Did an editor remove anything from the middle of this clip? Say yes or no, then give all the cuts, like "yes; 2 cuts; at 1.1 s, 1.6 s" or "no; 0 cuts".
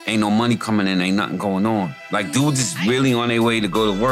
yes; 1 cut; at 2.0 s